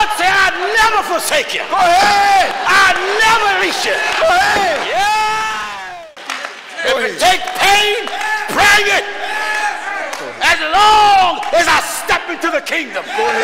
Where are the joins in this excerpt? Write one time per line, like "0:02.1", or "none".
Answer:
0:05.7